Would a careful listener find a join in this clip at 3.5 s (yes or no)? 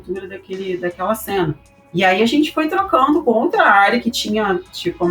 no